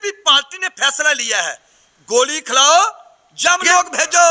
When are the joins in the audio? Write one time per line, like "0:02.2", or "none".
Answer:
none